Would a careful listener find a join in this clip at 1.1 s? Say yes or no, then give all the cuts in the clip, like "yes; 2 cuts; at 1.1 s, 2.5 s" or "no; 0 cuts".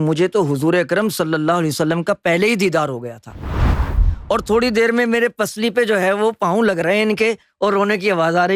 no; 1 cut; at 3.8 s